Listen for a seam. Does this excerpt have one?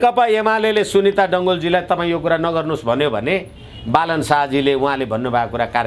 no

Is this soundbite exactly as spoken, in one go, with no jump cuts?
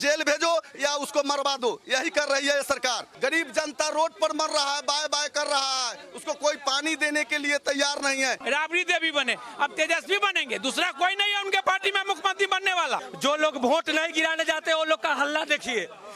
no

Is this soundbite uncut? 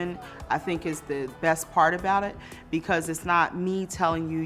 no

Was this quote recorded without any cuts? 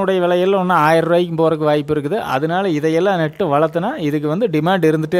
yes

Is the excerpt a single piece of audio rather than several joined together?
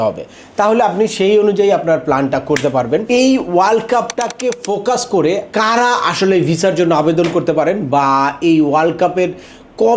no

